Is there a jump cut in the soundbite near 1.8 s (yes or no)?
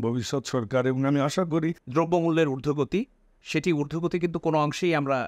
yes